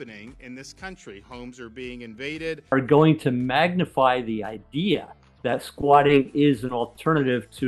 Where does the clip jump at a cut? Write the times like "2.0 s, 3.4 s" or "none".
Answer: 2.6 s